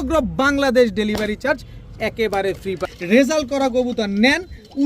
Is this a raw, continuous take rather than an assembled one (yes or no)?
no